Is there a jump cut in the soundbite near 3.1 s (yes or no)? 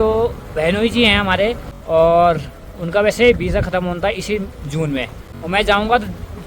no